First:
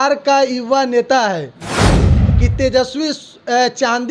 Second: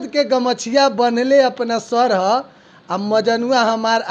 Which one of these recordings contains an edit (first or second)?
first